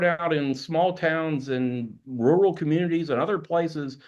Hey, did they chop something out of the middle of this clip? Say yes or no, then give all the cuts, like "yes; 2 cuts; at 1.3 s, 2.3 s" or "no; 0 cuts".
yes; 1 cut; at 2.0 s